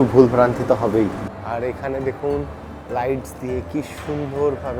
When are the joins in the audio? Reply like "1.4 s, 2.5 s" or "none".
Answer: 1.4 s